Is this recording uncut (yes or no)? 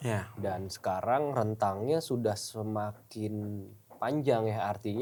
yes